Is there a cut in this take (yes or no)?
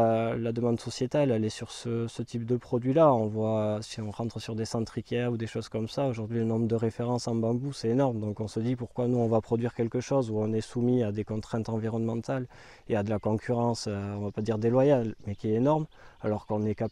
no